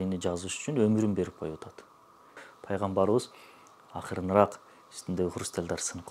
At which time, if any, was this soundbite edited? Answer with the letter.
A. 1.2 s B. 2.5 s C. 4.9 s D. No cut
B